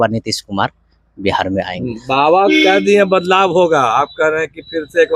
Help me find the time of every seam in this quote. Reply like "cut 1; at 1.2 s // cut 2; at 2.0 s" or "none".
none